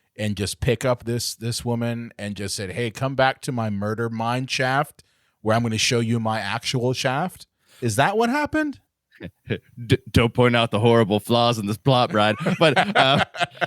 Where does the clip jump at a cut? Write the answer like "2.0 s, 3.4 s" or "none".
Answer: 9.1 s